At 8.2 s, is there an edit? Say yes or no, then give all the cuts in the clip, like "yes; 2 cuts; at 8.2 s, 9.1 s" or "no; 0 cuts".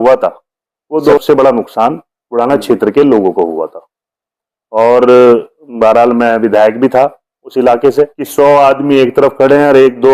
yes; 2 cuts; at 1.1 s, 8.2 s